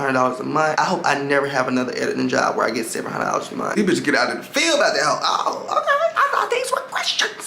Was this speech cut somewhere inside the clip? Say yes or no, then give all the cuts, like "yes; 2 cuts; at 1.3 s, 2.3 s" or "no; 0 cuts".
yes; 1 cut; at 3.7 s